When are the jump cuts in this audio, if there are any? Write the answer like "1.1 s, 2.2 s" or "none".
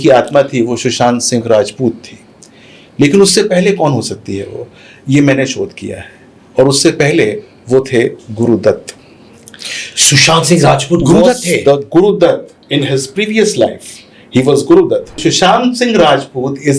15.1 s